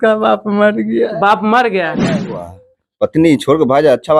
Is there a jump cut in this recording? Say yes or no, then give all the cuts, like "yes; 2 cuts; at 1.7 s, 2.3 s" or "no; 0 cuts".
yes; 1 cut; at 2.1 s